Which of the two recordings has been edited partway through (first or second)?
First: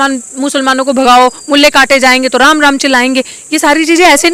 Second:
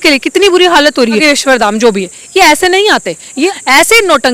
second